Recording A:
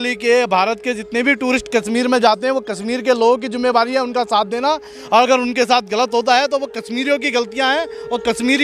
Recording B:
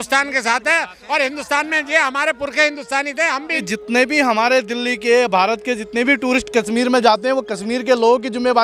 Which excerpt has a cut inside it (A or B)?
B